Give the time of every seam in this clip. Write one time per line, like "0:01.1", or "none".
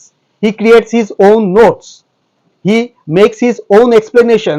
none